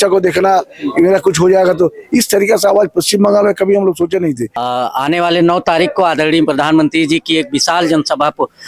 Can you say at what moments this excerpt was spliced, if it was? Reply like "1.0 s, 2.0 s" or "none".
4.6 s